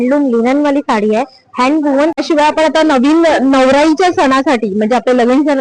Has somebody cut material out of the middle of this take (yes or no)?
yes